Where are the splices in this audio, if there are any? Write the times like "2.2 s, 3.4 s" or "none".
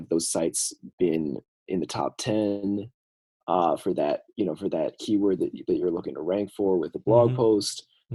none